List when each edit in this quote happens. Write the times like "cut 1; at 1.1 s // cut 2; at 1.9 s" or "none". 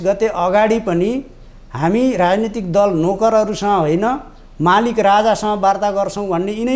none